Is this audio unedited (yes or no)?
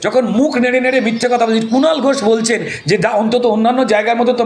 yes